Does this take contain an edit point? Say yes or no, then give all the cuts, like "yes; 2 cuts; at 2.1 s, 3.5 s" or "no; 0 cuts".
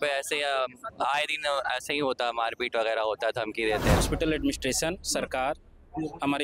yes; 1 cut; at 4.0 s